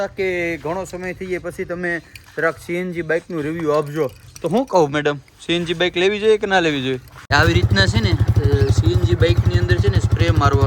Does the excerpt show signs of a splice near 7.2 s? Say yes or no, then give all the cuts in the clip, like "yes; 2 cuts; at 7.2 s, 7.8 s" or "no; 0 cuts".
yes; 1 cut; at 7.2 s